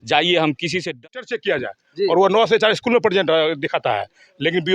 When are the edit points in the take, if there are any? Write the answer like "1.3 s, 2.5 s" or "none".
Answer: 1.0 s